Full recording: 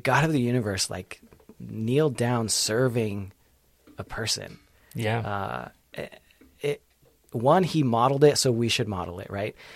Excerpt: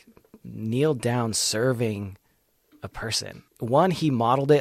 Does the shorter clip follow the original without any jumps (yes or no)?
no